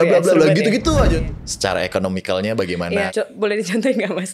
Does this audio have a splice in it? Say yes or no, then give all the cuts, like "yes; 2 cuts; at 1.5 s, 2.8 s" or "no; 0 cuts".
yes; 2 cuts; at 1.1 s, 3.1 s